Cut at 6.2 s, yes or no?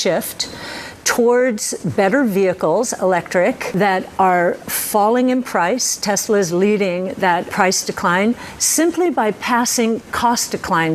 no